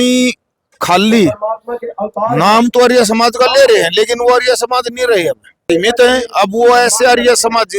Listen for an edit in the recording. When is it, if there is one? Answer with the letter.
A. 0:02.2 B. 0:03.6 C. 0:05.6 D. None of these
C